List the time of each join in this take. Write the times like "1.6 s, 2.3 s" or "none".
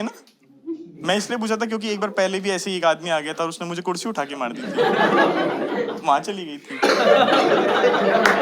0.9 s